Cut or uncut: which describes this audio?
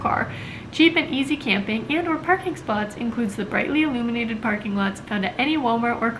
uncut